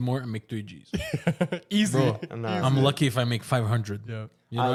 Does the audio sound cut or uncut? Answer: uncut